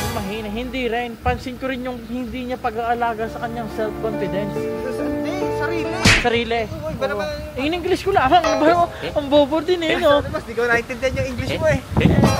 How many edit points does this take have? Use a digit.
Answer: 0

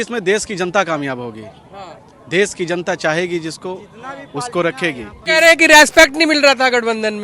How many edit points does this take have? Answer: 1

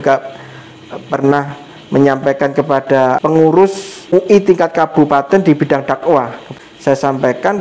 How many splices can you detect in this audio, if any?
3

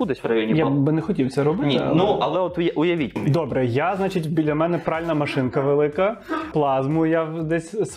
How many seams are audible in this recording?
2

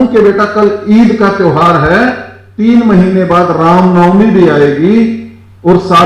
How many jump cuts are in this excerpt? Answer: 1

